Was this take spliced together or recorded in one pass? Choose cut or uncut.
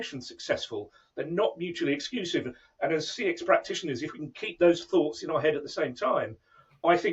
uncut